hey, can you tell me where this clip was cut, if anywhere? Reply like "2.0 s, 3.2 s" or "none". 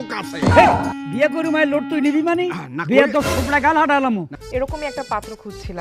4.2 s